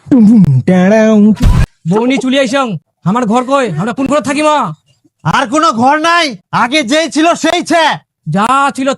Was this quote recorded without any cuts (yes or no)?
no